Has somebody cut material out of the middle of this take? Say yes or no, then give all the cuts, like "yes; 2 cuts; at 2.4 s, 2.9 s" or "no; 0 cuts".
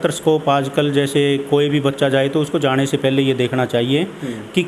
no; 0 cuts